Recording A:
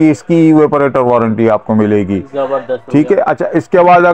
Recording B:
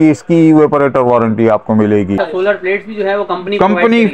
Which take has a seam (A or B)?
B